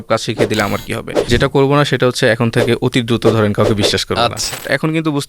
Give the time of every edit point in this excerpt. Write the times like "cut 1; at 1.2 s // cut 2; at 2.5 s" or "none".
cut 1; at 1.3 s // cut 2; at 4.4 s